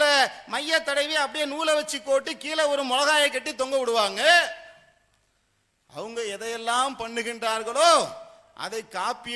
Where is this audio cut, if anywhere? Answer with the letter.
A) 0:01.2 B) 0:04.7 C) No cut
C